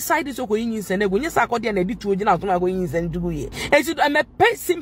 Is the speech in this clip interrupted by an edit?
yes; 1 cut; at 3.5 s

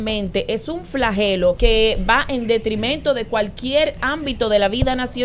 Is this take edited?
yes; 1 cut; at 1.6 s

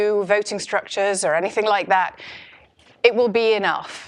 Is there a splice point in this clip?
yes; 1 cut; at 2.1 s

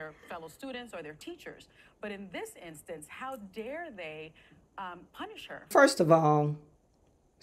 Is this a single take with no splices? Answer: no; 1 cut; at 5.6 s

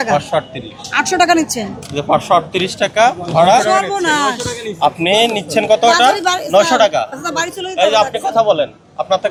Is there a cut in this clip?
no; 0 cuts

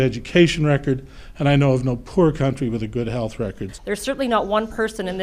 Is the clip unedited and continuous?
no; 1 cut; at 3.7 s

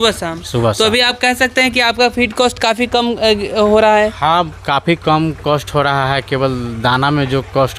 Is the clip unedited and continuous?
yes; 0 cuts

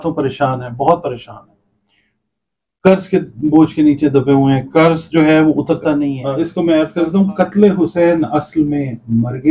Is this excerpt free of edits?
no; 1 cut; at 6.2 s

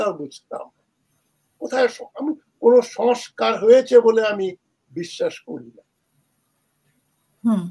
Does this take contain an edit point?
no; 0 cuts

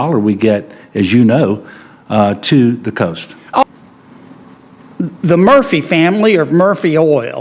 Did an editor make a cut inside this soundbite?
yes; 1 cut; at 3.6 s

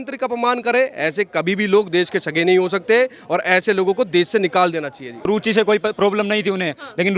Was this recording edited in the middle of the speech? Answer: yes; 1 cut; at 5.3 s

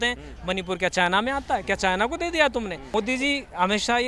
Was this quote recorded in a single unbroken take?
no; 1 cut; at 2.8 s

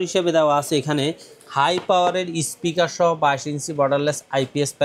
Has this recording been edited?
no; 0 cuts

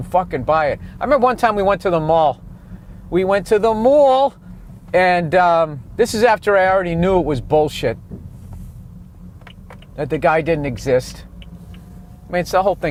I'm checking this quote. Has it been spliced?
no; 0 cuts

